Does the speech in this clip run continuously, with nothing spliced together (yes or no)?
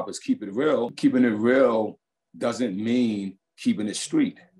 no